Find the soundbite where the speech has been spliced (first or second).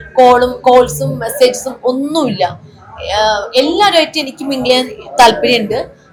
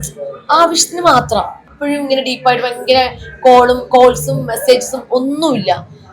second